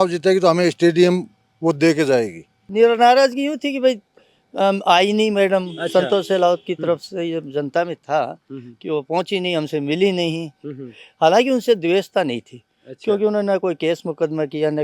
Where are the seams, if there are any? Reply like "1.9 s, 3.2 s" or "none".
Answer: 2.6 s